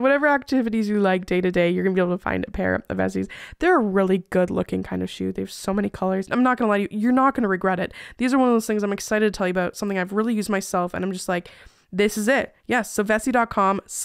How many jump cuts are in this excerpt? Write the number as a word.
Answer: one